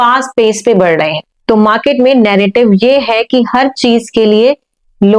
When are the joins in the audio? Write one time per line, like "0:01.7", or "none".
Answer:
0:01.3